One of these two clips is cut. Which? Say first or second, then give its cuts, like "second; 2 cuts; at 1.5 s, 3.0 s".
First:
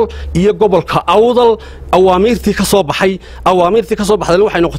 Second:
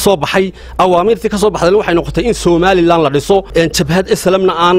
second; 1 cut; at 3.5 s